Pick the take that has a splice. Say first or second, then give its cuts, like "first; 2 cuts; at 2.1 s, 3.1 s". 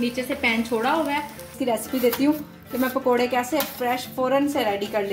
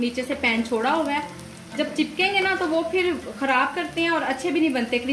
first; 1 cut; at 1.5 s